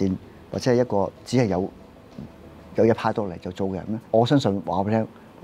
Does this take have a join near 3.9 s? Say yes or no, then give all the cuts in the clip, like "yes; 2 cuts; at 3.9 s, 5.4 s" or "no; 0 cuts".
yes; 1 cut; at 3.9 s